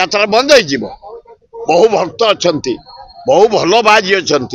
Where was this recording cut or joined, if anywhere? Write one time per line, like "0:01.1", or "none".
none